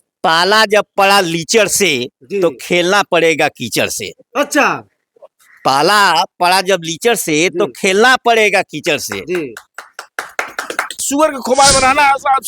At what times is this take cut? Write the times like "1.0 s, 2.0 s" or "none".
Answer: 11.0 s